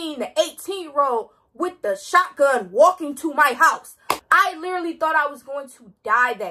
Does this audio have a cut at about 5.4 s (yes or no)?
no